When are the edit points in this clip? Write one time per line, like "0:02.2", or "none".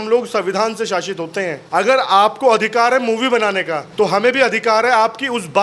0:01.6
0:03.8